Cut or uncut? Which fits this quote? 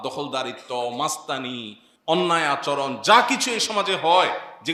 uncut